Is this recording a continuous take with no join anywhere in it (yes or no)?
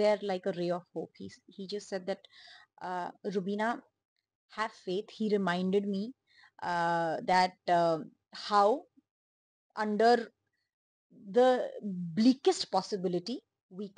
yes